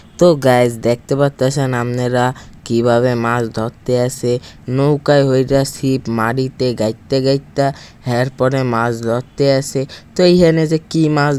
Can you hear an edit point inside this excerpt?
no; 0 cuts

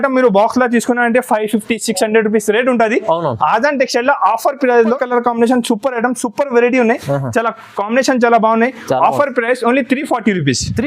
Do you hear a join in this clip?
yes; 1 cut; at 5.0 s

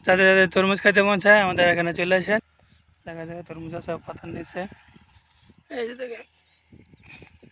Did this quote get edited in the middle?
yes; 1 cut; at 2.4 s

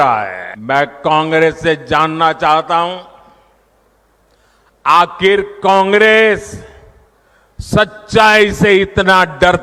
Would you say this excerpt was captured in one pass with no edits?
yes; 0 cuts

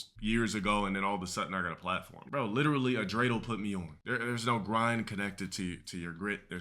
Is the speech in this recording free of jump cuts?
no; 2 cuts; at 2.2 s, 4.0 s

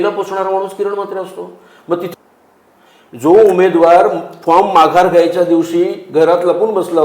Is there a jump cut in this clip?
yes; 1 cut; at 2.1 s

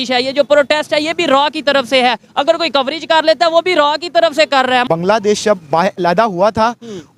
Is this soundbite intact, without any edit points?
no; 1 cut; at 4.8 s

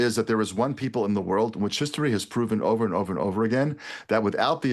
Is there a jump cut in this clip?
no; 0 cuts

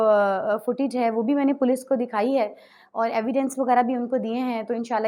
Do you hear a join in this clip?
no; 0 cuts

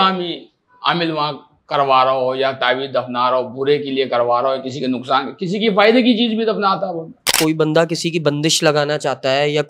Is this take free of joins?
no; 1 cut; at 7.4 s

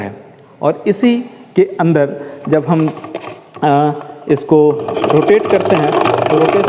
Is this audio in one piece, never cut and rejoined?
yes; 0 cuts

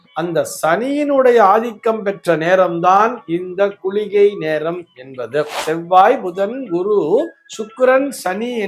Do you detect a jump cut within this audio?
yes; 1 cut; at 5.6 s

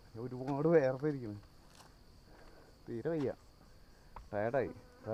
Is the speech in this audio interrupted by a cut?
no; 0 cuts

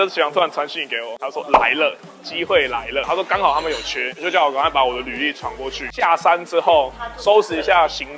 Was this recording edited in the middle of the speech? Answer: no; 0 cuts

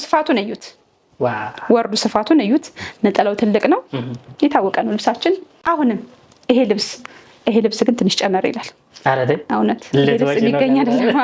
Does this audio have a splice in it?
no; 0 cuts

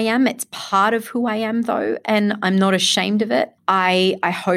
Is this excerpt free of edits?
no; 1 cut; at 3.5 s

